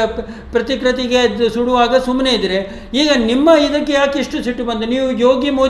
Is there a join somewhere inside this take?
no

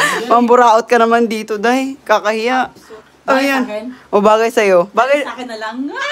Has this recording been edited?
no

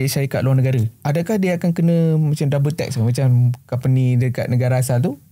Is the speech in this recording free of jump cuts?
no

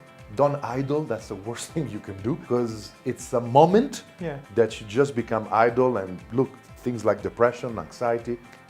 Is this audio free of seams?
no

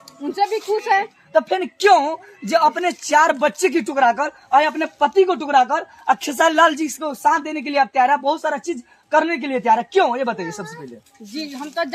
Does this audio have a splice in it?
no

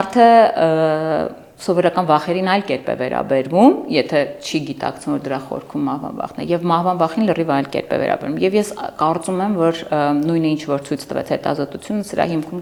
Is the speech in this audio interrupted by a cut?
no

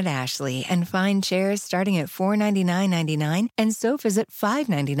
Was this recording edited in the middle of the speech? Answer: no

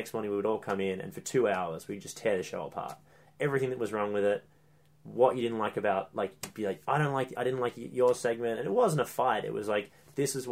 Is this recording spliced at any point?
no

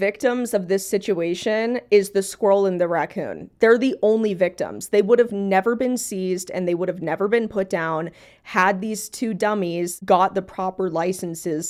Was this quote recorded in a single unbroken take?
yes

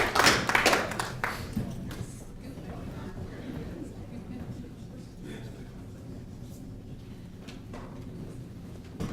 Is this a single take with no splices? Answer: no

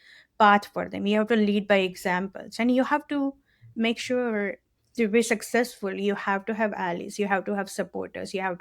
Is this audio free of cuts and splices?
no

